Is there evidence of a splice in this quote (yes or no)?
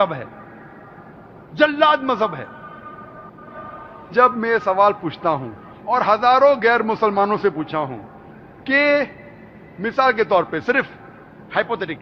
no